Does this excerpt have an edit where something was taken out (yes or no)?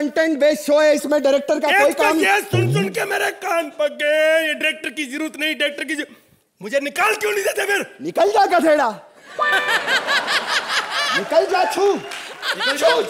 no